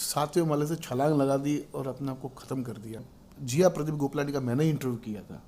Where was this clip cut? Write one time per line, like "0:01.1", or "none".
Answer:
0:03.1

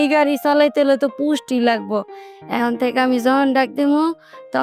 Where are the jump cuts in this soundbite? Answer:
0:02.3

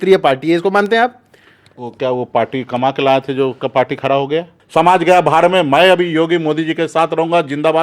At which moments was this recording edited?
0:04.6

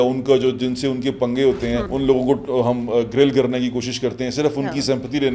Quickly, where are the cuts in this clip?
0:01.9

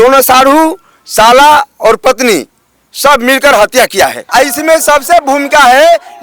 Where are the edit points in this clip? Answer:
0:04.2

